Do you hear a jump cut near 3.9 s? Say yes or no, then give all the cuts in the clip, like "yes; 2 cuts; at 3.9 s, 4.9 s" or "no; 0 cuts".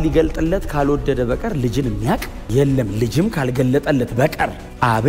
no; 0 cuts